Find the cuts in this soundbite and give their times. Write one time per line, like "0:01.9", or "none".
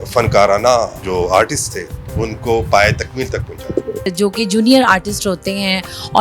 0:01.0
0:04.1

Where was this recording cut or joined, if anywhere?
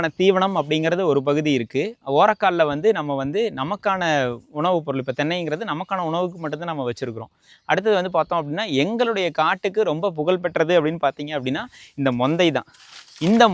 none

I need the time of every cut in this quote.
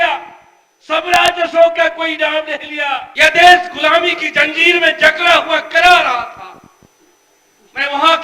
0:03.1

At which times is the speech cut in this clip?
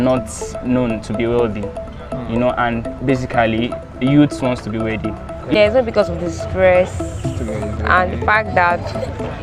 0:05.5

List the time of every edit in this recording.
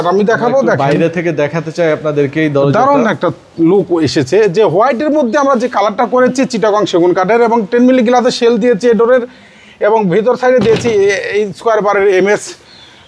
none

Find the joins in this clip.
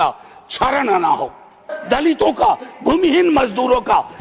0:01.7

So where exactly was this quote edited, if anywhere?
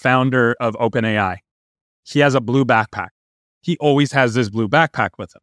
0:03.4

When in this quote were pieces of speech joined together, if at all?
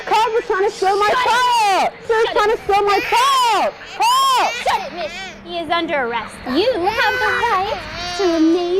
none

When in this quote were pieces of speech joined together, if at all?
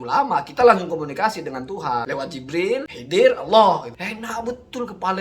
0:02.4
0:04.0

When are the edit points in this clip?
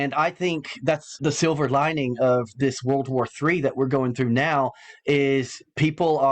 0:01.1

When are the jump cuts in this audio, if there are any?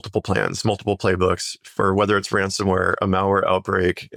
none

